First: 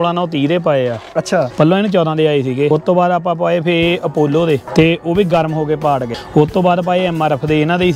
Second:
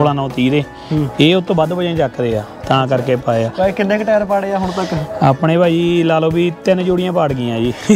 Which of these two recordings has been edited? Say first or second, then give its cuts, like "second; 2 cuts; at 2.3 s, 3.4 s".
first; 4 cuts; at 1.5 s, 2.7 s, 4.7 s, 6.2 s